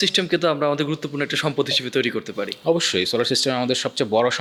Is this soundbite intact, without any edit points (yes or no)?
yes